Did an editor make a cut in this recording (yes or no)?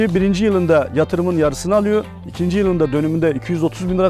no